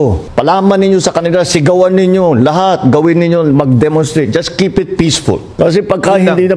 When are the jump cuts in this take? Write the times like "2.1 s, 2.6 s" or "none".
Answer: none